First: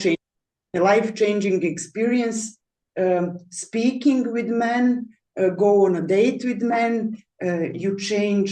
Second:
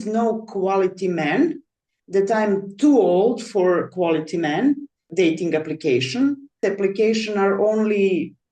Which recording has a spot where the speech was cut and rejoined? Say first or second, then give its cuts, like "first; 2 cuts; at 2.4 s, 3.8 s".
second; 2 cuts; at 5.0 s, 6.6 s